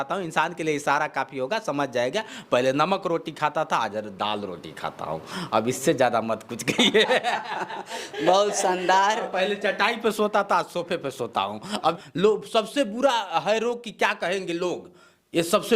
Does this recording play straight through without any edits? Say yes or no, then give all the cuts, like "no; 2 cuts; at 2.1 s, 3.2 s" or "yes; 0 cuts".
no; 1 cut; at 12.0 s